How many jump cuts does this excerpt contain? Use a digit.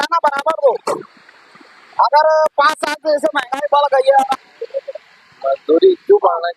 1